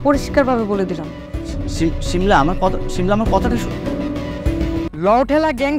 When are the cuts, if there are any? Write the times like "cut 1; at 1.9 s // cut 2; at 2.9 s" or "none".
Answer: cut 1; at 4.9 s